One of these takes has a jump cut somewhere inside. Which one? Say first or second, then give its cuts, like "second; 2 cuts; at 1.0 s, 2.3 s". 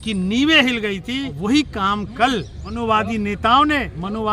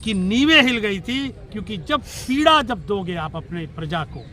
first; 2 cuts; at 1.3 s, 2.6 s